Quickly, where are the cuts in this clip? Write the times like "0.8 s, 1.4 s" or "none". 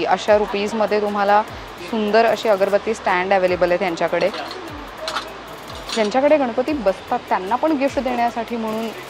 none